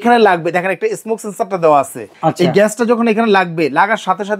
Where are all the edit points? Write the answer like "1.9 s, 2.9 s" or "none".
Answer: 2.0 s